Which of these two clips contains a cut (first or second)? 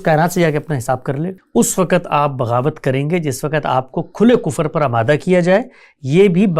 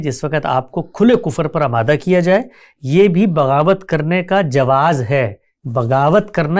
first